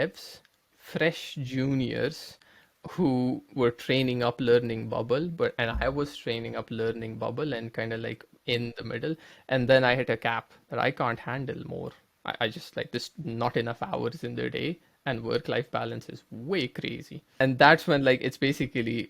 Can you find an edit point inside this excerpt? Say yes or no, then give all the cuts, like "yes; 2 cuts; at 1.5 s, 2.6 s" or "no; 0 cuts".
yes; 1 cut; at 17.3 s